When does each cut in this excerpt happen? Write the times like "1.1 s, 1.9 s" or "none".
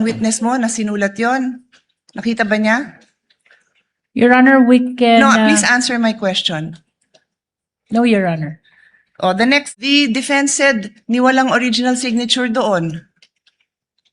9.7 s